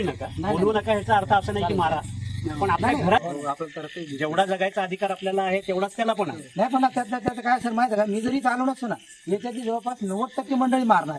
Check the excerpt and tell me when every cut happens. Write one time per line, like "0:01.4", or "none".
0:03.2